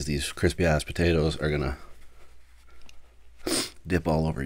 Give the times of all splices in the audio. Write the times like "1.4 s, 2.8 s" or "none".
none